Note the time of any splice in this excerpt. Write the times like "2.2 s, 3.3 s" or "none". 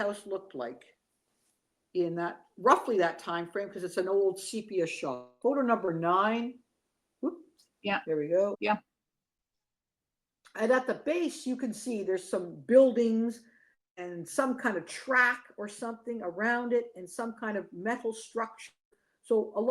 8.5 s